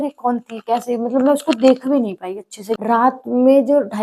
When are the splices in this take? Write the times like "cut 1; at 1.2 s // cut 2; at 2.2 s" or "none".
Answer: cut 1; at 3.0 s